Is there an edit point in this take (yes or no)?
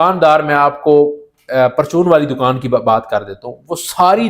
no